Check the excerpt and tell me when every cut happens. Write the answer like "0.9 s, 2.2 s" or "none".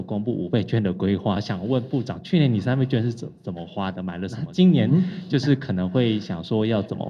4.4 s